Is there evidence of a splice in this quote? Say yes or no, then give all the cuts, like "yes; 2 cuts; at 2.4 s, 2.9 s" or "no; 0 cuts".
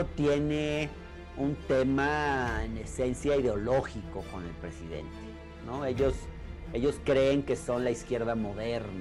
no; 0 cuts